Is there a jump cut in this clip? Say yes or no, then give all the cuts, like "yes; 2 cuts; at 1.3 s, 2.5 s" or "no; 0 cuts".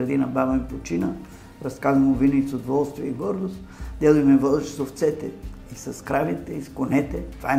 no; 0 cuts